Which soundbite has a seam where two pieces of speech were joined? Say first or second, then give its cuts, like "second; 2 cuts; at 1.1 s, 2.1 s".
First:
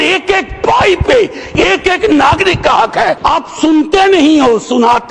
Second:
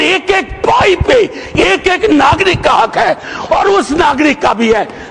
first; 1 cut; at 3.2 s